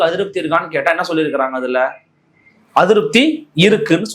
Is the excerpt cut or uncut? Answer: uncut